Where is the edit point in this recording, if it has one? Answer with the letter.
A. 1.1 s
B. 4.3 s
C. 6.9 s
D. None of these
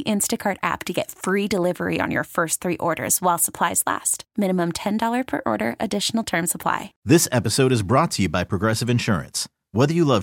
C